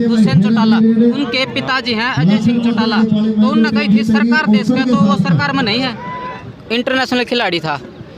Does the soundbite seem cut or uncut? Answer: cut